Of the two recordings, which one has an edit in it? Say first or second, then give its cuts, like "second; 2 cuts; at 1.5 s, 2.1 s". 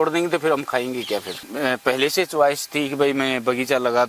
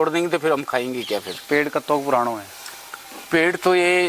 first; 1 cut; at 1.4 s